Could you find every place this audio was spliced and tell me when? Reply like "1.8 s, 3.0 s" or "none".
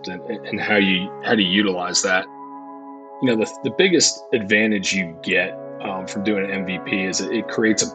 2.5 s